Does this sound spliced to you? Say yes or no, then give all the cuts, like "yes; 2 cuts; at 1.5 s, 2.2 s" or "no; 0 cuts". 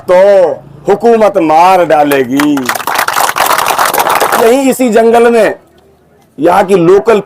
yes; 1 cut; at 4.4 s